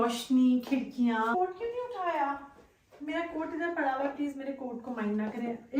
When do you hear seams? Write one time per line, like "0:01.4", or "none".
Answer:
0:01.3